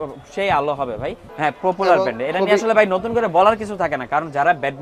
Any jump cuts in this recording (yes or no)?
yes